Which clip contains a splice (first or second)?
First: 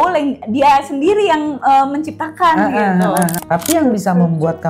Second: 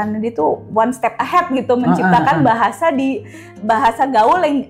first